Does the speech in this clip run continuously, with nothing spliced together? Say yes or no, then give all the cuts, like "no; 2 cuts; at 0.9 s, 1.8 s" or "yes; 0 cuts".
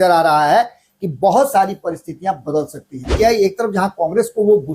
no; 1 cut; at 3.1 s